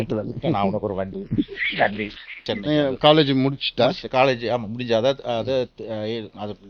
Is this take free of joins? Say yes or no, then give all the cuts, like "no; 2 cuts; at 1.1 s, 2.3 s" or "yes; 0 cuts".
no; 1 cut; at 2.4 s